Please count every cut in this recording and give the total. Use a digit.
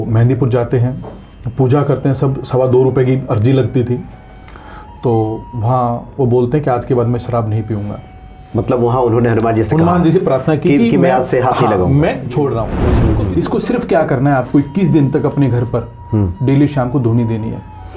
1